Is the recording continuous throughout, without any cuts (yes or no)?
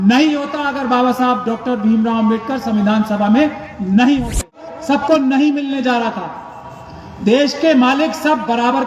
no